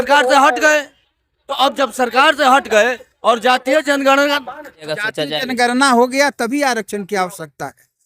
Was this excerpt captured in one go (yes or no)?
no